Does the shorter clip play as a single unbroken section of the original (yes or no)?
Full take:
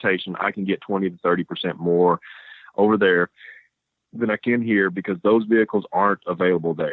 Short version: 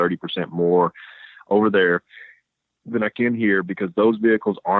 yes